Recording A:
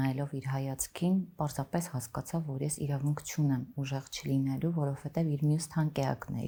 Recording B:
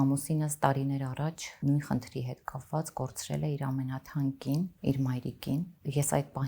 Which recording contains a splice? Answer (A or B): B